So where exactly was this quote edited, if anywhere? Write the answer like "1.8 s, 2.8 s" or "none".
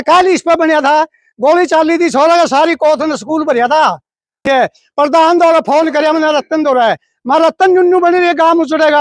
4.4 s